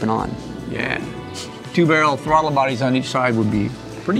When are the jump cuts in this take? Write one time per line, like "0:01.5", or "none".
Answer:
none